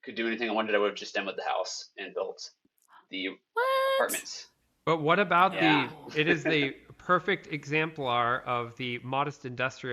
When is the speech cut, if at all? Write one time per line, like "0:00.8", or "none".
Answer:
none

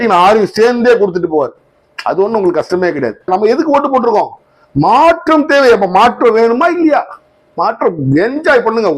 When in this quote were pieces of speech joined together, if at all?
0:03.3

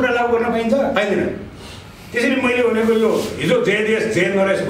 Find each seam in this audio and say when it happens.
none

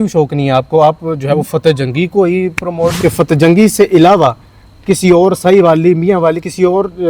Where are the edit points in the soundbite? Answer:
0:03.0

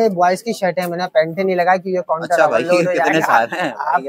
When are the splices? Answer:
none

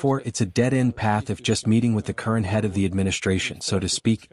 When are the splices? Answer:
none

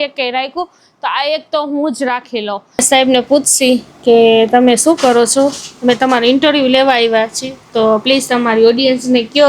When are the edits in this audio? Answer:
0:02.7

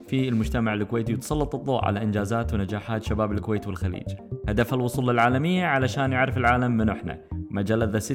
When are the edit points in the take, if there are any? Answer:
none

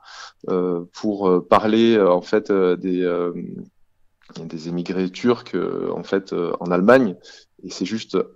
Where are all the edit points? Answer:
none

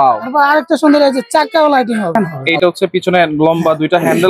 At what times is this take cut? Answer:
0:02.1

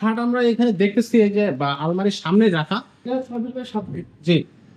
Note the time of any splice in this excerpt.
0:03.1

